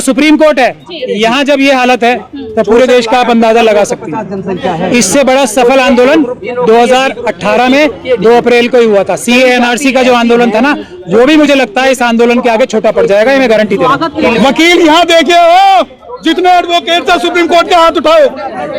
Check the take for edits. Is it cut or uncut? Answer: cut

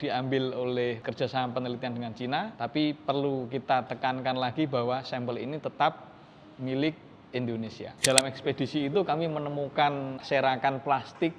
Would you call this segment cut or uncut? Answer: cut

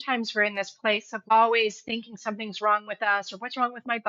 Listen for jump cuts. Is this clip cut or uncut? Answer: cut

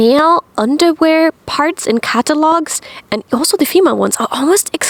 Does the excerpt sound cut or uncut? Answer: uncut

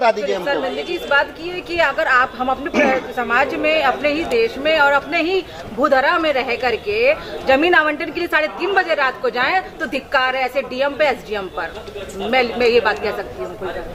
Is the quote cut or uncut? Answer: uncut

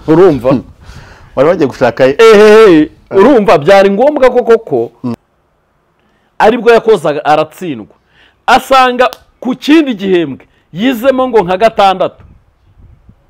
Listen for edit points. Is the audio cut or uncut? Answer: cut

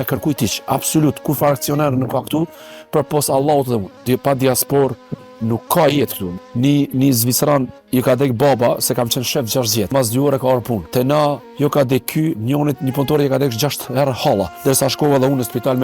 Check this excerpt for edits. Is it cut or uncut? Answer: cut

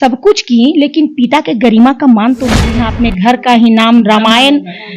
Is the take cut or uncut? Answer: cut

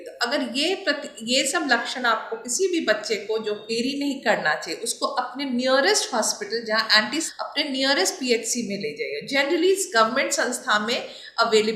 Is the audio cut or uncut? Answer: cut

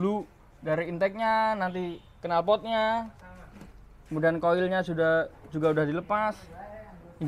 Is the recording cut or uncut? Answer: uncut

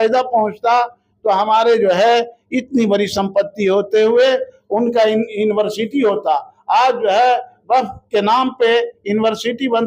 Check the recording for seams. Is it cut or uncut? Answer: uncut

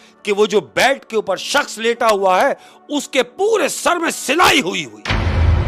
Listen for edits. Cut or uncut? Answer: uncut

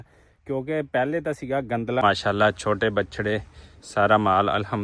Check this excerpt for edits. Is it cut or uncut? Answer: cut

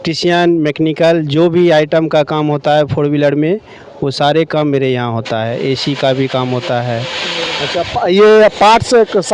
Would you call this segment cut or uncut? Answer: uncut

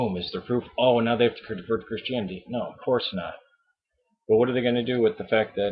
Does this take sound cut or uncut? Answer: uncut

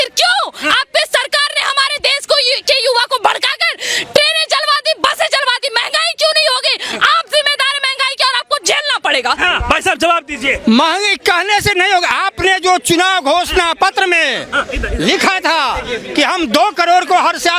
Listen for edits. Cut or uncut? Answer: uncut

